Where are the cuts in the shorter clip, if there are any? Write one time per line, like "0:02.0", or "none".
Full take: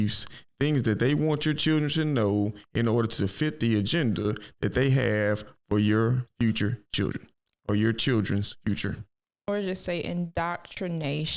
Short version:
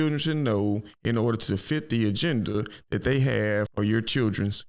0:03.7

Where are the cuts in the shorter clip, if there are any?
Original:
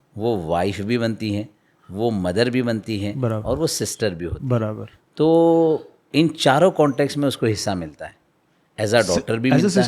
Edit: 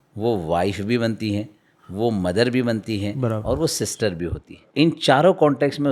0:04.5

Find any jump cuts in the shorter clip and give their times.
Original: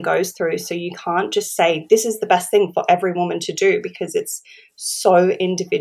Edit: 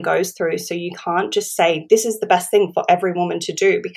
none

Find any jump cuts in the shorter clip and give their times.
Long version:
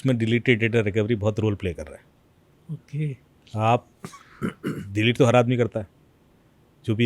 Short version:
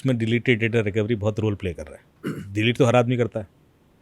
0:02.2

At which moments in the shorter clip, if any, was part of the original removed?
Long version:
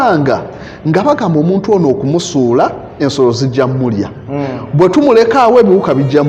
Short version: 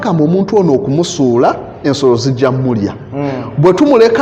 none

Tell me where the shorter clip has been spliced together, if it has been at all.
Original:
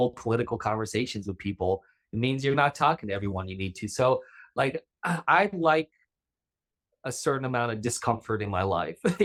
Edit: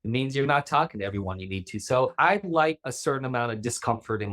0:02.1
0:02.9

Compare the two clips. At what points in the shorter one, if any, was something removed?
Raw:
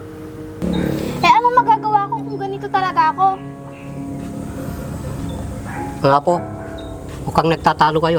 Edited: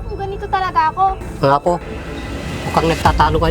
0:01.3

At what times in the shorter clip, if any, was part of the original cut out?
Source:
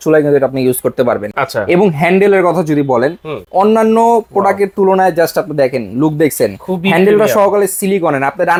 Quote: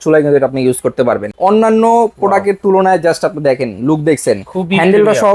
0:01.3

